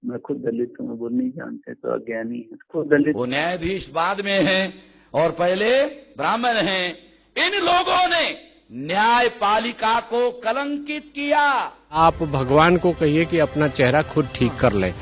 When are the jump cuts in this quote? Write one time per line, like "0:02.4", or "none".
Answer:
0:03.2
0:11.8